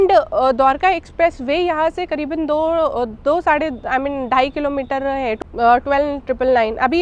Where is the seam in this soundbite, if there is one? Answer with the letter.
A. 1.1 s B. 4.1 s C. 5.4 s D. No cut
C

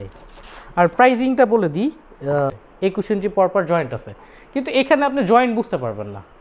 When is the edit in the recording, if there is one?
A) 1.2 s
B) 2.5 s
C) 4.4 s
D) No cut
B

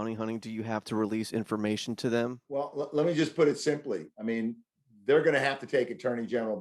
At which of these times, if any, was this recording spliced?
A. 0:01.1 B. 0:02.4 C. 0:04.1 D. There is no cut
B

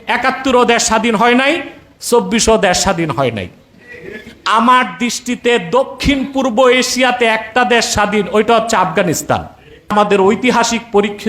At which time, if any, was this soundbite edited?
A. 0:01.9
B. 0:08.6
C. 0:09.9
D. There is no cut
C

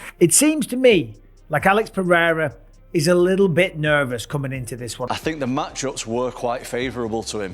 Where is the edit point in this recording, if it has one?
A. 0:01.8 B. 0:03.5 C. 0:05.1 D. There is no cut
C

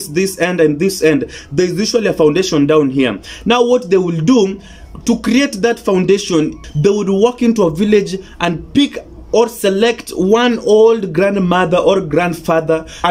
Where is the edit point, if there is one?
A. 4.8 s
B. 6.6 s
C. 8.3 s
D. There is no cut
B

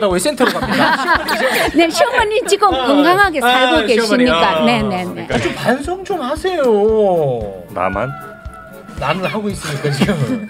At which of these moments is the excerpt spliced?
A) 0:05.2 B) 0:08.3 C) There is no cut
A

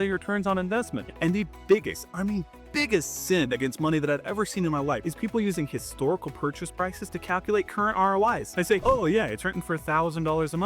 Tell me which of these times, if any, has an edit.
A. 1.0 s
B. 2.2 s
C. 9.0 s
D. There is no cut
A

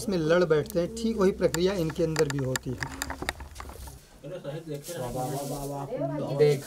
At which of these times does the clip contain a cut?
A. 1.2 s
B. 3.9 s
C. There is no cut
B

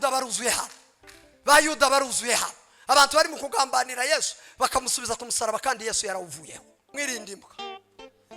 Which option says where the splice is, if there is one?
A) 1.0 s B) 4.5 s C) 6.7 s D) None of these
C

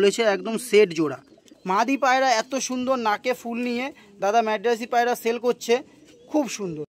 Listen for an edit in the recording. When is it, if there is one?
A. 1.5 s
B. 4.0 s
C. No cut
A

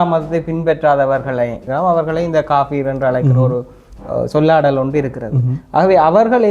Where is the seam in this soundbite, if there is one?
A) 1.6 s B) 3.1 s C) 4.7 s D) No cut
A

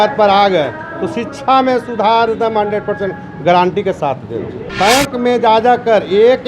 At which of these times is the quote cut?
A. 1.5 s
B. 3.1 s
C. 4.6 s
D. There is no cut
C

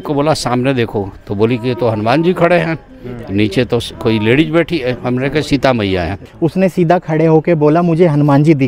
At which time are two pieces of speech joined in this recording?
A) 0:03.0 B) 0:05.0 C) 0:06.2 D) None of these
C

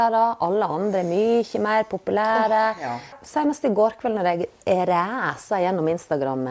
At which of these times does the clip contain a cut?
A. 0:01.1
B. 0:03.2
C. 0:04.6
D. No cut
B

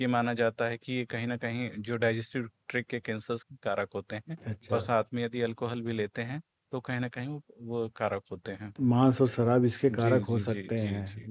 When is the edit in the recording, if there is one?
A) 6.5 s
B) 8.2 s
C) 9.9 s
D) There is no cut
D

